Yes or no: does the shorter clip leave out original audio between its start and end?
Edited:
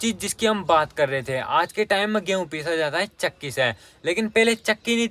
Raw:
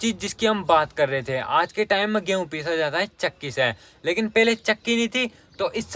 no